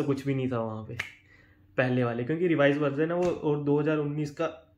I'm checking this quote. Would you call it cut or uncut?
uncut